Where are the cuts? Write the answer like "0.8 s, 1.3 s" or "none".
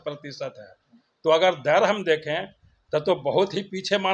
none